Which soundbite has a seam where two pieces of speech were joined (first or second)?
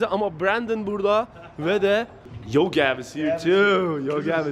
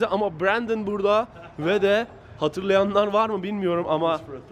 first